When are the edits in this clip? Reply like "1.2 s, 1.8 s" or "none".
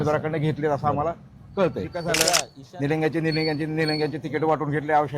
2.1 s